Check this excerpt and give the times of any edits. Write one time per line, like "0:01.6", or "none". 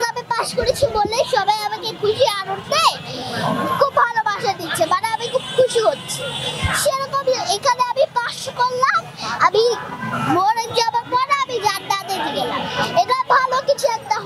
none